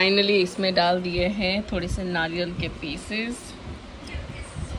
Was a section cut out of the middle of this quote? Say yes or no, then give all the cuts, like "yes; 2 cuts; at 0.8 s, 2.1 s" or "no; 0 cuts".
no; 0 cuts